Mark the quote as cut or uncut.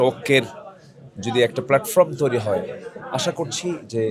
uncut